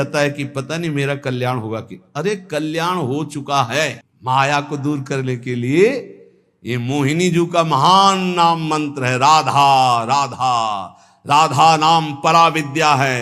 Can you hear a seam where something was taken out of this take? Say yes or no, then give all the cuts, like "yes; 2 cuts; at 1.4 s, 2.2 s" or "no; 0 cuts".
yes; 1 cut; at 4.0 s